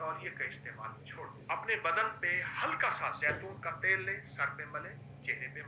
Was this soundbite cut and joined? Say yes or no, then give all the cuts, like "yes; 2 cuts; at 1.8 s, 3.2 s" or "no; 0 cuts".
yes; 1 cut; at 1.4 s